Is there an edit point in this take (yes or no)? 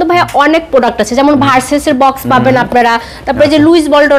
no